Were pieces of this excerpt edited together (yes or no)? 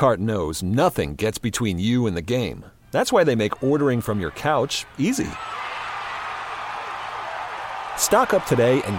no